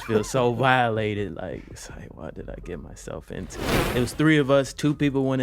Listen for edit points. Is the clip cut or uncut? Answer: cut